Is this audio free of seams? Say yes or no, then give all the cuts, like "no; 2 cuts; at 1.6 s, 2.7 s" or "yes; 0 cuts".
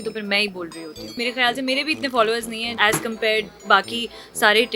no; 2 cuts; at 1.0 s, 2.7 s